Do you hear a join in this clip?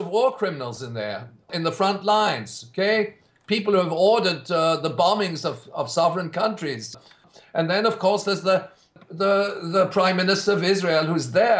yes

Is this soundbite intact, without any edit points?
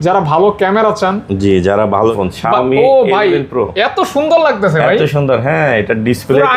no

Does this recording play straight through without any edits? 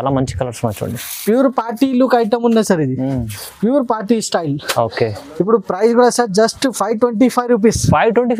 yes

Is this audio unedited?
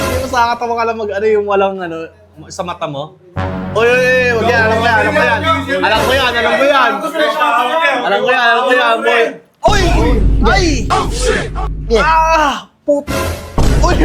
yes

